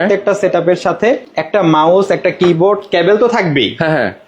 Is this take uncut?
no; 1 cut; at 1.3 s

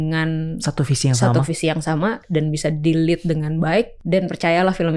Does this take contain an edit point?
yes; 1 cut; at 4.0 s

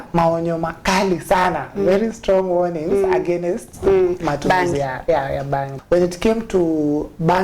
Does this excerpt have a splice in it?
yes; 1 cut; at 5.7 s

